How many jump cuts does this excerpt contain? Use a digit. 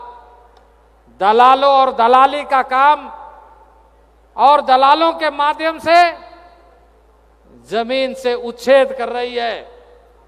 0